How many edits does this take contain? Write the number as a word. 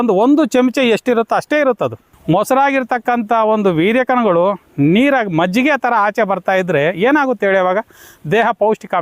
one